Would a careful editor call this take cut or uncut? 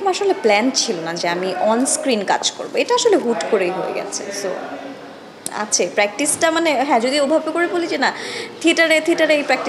uncut